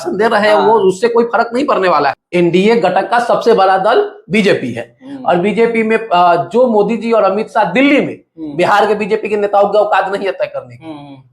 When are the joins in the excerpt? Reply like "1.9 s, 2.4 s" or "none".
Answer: 2.2 s